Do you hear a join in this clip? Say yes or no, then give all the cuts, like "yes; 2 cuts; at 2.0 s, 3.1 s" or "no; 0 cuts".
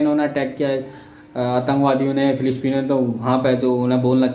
no; 0 cuts